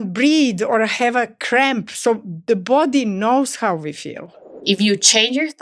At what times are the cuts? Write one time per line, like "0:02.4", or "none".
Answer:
0:04.5